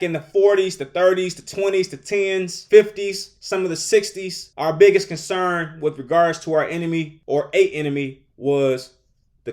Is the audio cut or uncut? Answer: uncut